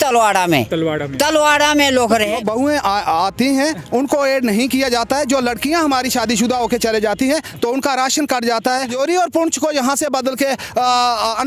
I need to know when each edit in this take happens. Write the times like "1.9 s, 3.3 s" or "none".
2.4 s, 8.8 s

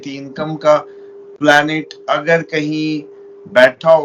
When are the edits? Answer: none

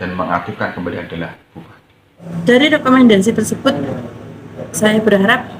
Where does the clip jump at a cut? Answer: 2.3 s

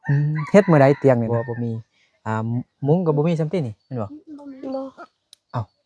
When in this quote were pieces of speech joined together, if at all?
1.3 s

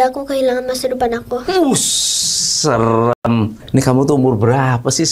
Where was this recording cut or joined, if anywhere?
none

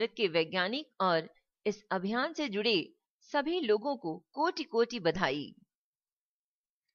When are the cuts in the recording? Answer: 4.7 s

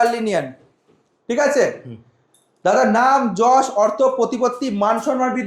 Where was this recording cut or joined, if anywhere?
none

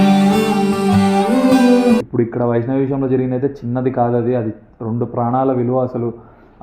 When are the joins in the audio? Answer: 2.1 s

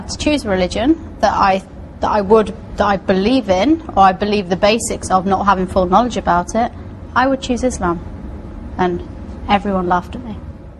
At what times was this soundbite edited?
none

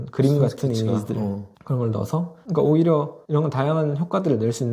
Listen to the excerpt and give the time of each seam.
none

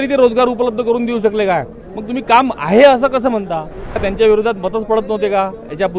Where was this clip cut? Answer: 4.0 s

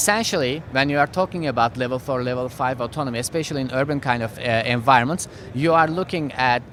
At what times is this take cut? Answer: none

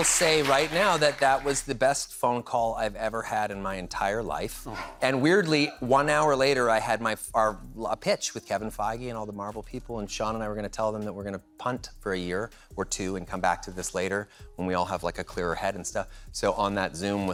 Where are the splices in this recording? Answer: none

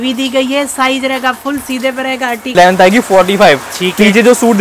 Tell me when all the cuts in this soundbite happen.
2.5 s

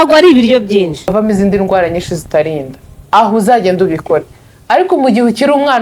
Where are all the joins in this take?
1.1 s

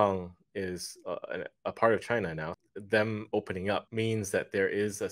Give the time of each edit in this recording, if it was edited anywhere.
2.5 s, 3.9 s

